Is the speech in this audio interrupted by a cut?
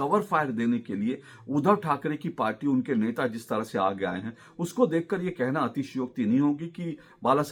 no; 0 cuts

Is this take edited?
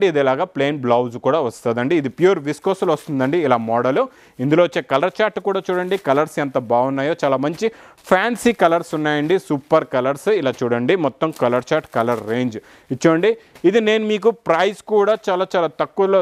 no; 0 cuts

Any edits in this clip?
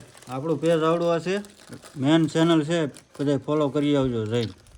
no; 0 cuts

